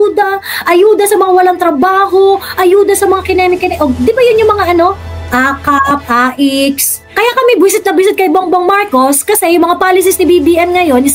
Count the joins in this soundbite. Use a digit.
1